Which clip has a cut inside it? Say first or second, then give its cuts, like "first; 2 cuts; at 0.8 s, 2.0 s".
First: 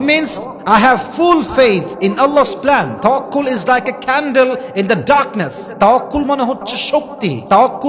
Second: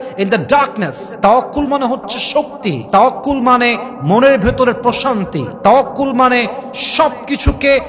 first; 1 cut; at 2.9 s